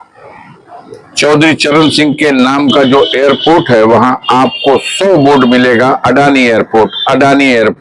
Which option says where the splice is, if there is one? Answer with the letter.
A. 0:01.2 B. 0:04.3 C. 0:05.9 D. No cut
D